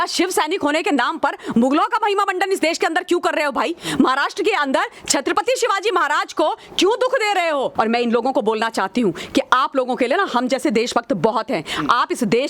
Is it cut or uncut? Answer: cut